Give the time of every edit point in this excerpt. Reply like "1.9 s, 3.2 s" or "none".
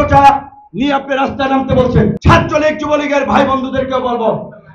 2.2 s